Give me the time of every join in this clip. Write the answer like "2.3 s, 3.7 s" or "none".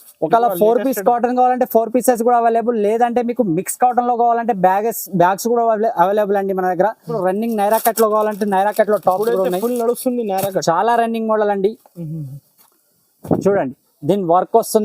7.1 s